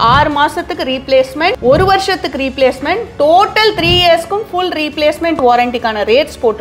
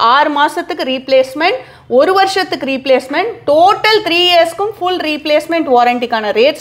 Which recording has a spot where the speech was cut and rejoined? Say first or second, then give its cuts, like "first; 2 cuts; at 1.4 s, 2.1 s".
first; 1 cut; at 1.6 s